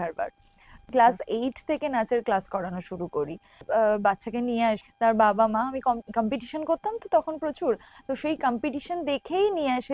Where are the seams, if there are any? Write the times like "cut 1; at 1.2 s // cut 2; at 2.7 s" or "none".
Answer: cut 1; at 0.9 s // cut 2; at 3.6 s // cut 3; at 4.8 s

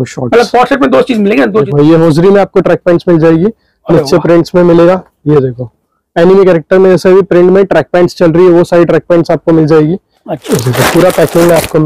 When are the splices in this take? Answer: cut 1; at 1.7 s // cut 2; at 10.4 s

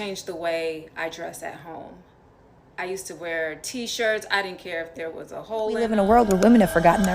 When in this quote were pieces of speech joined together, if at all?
cut 1; at 5.9 s

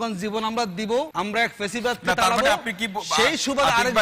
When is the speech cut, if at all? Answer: cut 1; at 1.1 s

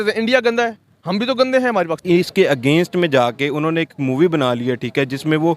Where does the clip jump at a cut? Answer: cut 1; at 2.0 s

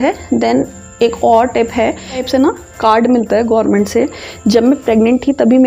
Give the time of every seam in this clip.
cut 1; at 2.2 s

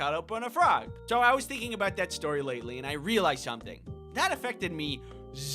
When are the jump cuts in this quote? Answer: cut 1; at 0.9 s

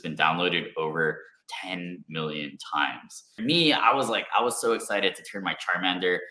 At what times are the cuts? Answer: cut 1; at 3.4 s

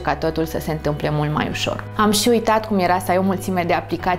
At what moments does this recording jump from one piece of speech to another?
cut 1; at 1.9 s

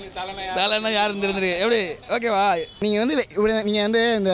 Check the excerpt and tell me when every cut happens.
cut 1; at 2.7 s

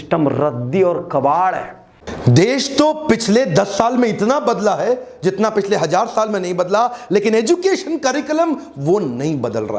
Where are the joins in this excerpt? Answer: cut 1; at 2.0 s

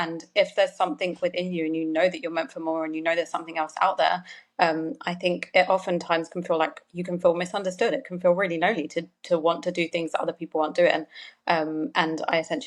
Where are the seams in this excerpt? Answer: none

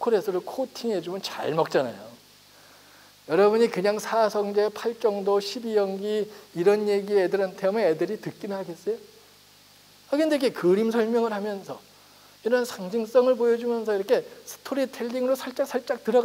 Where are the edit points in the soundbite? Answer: none

